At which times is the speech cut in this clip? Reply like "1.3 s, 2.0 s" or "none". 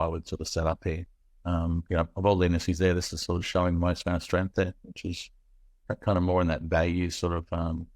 1.1 s